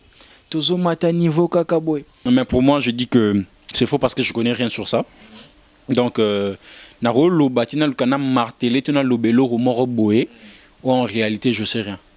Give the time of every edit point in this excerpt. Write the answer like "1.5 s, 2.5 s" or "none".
2.3 s